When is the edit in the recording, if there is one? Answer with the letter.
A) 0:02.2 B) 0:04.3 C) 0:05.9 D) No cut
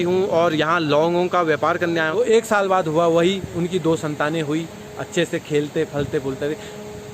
A